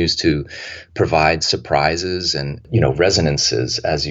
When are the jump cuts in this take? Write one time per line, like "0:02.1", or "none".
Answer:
0:02.6